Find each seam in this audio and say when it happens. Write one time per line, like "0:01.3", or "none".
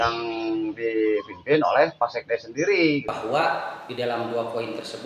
0:03.1